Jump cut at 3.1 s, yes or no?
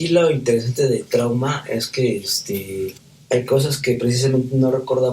yes